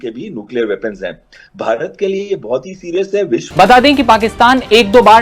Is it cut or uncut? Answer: cut